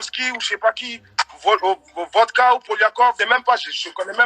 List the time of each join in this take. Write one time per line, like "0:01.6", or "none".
0:03.2